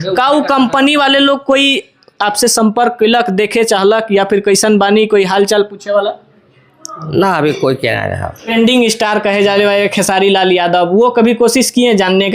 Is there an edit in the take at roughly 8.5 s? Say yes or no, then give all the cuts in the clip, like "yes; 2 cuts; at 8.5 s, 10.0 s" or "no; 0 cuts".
yes; 1 cut; at 8.5 s